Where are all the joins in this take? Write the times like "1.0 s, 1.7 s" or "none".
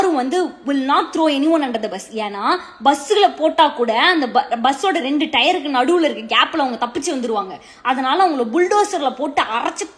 none